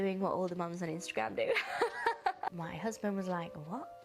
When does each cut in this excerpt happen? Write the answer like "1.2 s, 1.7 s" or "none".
2.5 s